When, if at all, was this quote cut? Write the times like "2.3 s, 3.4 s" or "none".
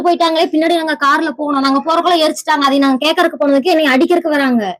none